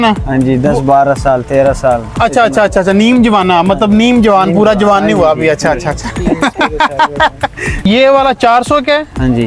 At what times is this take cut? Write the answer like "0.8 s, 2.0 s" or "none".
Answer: 7.8 s